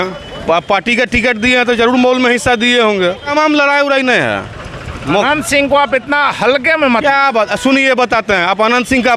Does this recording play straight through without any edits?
no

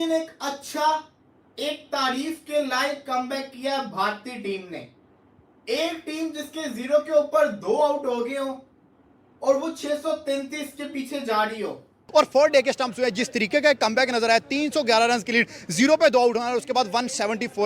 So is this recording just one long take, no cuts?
no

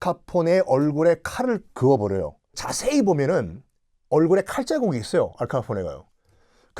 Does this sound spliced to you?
yes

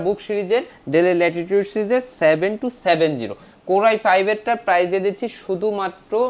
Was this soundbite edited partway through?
no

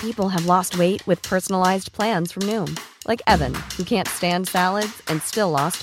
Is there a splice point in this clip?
no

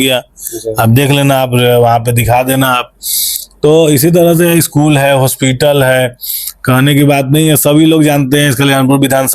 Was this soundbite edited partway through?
no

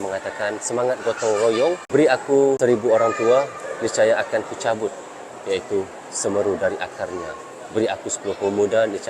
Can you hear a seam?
yes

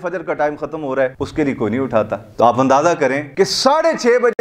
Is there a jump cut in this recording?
yes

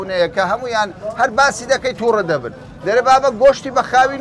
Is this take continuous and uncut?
yes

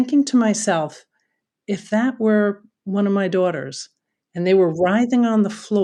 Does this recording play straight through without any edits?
yes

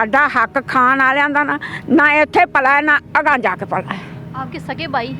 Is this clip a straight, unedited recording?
yes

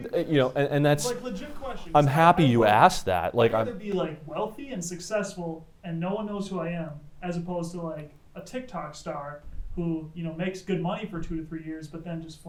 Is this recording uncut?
yes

